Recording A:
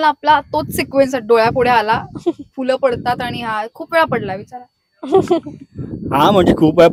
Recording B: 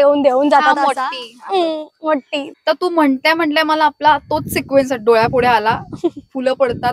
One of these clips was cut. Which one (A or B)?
B